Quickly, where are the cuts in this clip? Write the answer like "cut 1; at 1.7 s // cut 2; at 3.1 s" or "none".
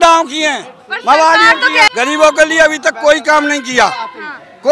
cut 1; at 1.9 s